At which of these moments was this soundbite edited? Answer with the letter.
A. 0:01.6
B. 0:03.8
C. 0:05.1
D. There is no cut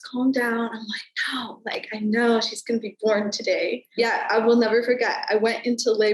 B